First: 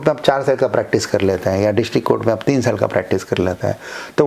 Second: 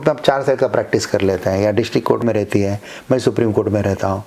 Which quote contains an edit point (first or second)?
second